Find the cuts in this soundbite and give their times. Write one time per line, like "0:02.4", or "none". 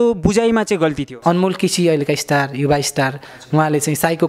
0:01.1
0:03.3